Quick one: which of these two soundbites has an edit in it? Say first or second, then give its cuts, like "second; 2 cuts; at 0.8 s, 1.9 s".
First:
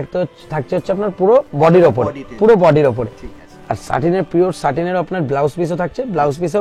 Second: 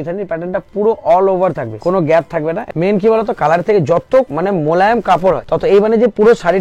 second; 4 cuts; at 1.7 s, 2.6 s, 4.3 s, 5.4 s